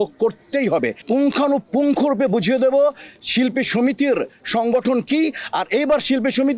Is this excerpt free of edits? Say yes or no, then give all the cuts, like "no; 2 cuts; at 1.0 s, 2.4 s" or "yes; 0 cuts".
no; 1 cut; at 1.0 s